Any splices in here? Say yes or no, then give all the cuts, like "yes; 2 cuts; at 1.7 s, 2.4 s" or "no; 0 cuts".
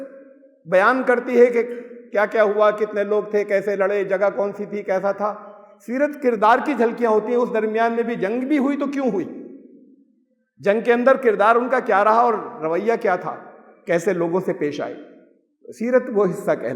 no; 0 cuts